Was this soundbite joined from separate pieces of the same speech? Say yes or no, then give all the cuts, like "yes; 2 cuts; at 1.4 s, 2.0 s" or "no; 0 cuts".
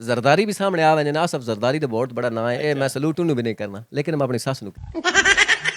yes; 1 cut; at 4.8 s